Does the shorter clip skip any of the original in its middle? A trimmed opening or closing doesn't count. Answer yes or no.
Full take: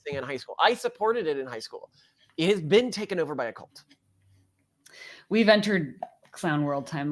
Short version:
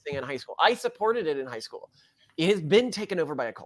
no